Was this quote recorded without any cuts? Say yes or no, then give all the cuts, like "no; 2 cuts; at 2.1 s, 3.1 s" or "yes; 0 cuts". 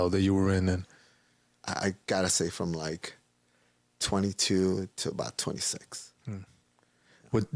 yes; 0 cuts